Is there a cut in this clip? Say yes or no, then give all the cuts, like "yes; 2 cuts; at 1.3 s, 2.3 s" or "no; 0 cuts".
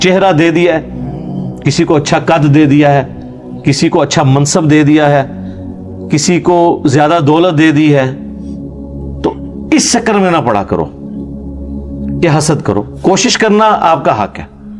no; 0 cuts